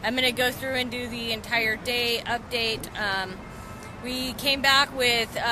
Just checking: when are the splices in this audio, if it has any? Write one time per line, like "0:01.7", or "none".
none